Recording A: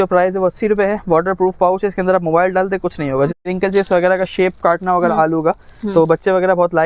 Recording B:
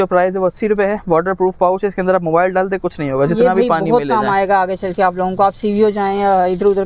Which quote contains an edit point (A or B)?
A